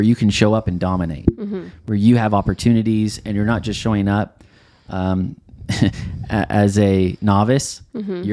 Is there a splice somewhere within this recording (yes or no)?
no